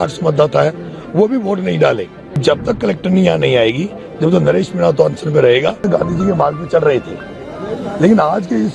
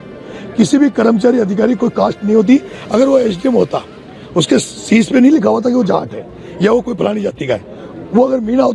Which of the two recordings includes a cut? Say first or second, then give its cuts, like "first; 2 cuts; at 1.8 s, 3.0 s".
first; 2 cuts; at 2.4 s, 5.8 s